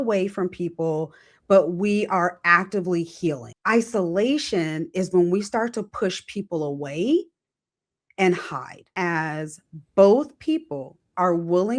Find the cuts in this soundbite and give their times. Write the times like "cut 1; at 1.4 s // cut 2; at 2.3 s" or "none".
cut 1; at 3.5 s // cut 2; at 8.9 s